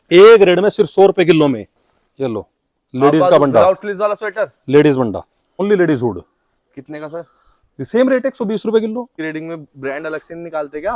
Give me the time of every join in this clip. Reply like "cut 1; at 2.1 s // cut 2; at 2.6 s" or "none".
cut 1; at 5.6 s // cut 2; at 9.2 s